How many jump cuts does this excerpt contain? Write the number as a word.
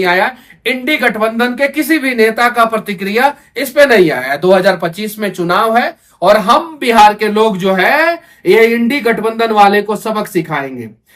zero